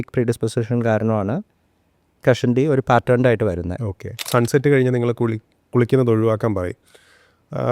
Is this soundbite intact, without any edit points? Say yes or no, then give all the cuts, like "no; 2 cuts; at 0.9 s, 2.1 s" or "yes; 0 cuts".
no; 1 cut; at 4.2 s